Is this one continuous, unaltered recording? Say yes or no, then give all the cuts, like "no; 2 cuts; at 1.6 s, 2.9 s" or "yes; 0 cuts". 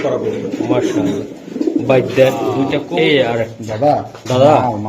no; 1 cut; at 2.8 s